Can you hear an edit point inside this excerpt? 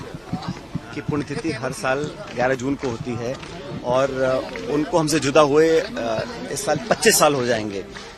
no; 0 cuts

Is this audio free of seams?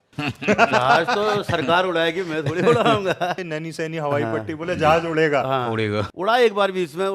no; 2 cuts; at 3.5 s, 6.1 s

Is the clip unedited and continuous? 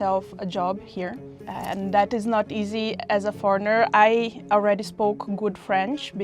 no; 1 cut; at 1.4 s

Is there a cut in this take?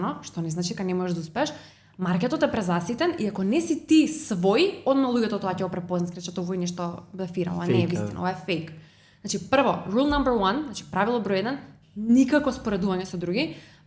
no; 0 cuts

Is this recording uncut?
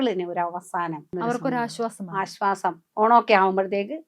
no; 2 cuts; at 1.1 s, 2.8 s

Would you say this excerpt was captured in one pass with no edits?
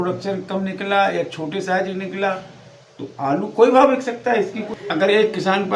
no; 1 cut; at 4.7 s

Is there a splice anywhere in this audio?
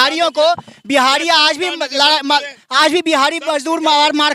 no; 0 cuts

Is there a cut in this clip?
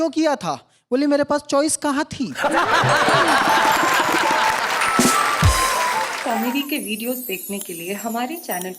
yes; 1 cut; at 6.2 s

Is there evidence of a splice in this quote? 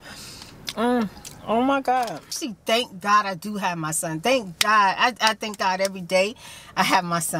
yes; 1 cut; at 2.4 s

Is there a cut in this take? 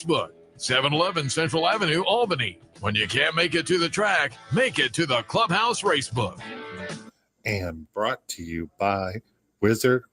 yes; 1 cut; at 7.0 s

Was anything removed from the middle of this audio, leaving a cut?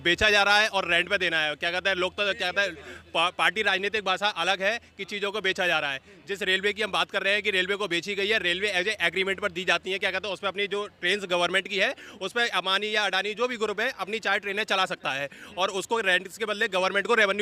no; 0 cuts

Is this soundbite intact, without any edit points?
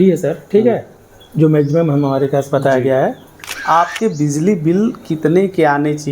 no; 1 cut; at 3.5 s

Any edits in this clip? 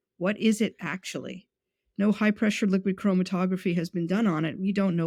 no; 0 cuts

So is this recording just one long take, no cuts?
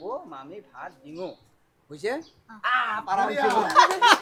yes; 0 cuts

